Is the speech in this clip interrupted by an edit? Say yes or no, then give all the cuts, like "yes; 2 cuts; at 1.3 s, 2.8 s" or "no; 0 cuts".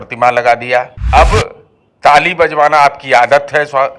yes; 1 cut; at 1.0 s